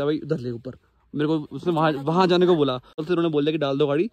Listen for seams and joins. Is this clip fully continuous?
no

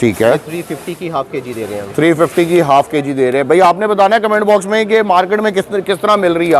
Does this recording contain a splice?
no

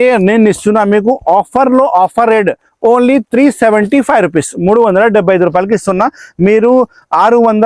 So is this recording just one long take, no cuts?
yes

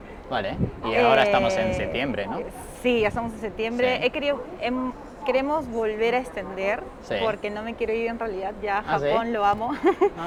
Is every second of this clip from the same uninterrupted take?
yes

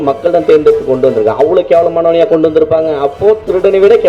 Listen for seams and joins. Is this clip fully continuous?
yes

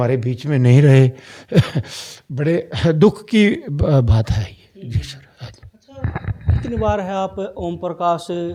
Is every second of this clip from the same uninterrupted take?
yes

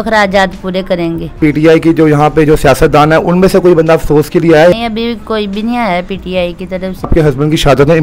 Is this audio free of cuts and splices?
no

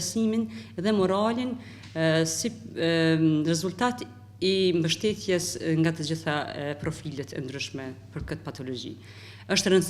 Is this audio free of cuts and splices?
yes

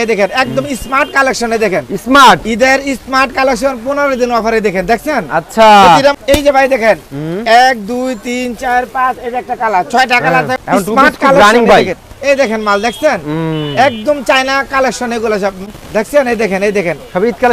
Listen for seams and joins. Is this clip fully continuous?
no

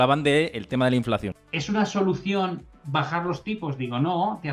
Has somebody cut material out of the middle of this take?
yes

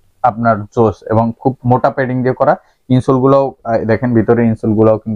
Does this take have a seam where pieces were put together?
no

